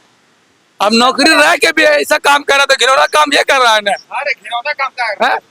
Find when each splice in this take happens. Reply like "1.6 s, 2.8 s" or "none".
none